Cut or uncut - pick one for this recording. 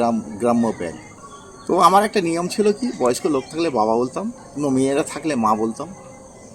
cut